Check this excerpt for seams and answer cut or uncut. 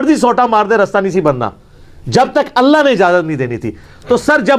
uncut